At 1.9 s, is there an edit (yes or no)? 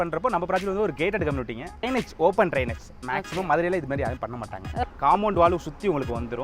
yes